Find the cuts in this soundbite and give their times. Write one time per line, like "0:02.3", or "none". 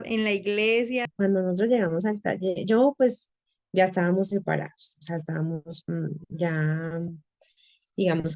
0:01.1